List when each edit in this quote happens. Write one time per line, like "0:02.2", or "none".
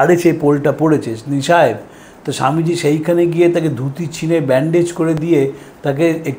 none